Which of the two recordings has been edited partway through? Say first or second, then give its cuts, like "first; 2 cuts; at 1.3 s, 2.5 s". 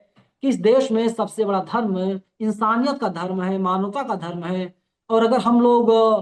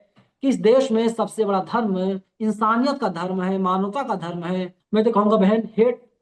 second; 1 cut; at 4.8 s